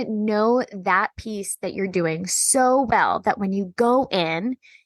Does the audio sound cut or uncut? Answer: uncut